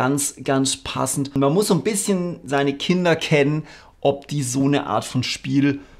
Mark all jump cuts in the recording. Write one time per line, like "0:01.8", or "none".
0:01.3